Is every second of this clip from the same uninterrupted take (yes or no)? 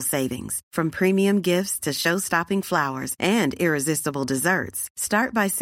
yes